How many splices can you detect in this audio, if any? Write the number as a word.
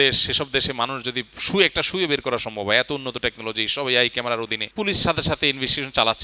one